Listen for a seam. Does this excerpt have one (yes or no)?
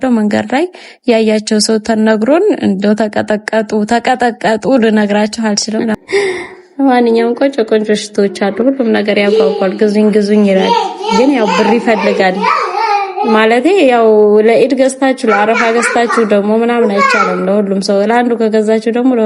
yes